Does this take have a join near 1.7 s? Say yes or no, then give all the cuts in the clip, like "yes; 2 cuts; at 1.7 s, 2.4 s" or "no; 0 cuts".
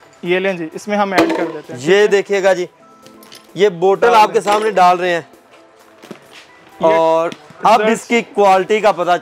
no; 0 cuts